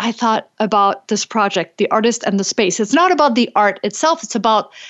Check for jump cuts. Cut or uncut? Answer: uncut